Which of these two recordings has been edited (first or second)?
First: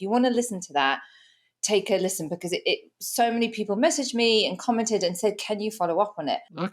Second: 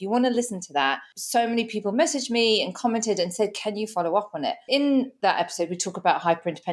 second